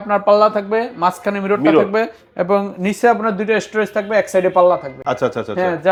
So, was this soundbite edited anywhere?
no; 0 cuts

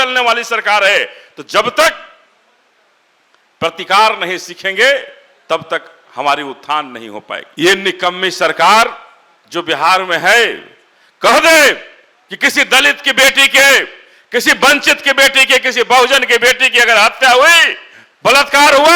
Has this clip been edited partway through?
yes; 1 cut; at 7.4 s

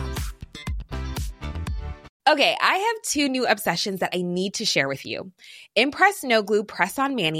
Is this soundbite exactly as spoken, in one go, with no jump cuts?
no; 1 cut; at 2.1 s

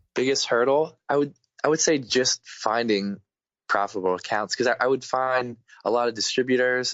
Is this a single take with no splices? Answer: no; 1 cut; at 1.0 s

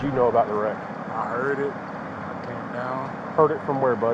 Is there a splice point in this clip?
no; 0 cuts

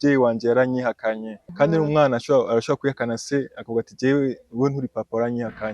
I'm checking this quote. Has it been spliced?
yes; 1 cut; at 1.3 s

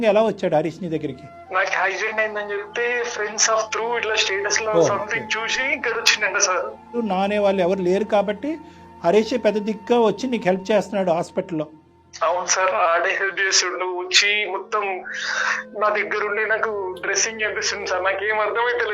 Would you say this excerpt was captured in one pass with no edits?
no; 1 cut; at 7.0 s

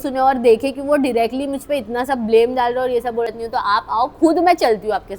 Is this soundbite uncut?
no; 1 cut; at 3.3 s

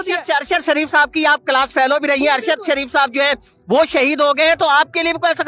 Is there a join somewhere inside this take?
no; 0 cuts

